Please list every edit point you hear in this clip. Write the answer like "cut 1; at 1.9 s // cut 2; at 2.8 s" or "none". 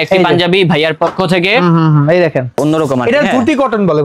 cut 1; at 2.6 s